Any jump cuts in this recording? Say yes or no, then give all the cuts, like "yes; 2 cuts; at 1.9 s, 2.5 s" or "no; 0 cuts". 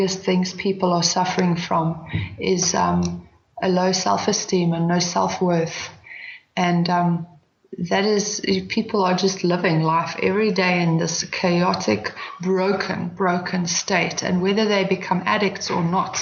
no; 0 cuts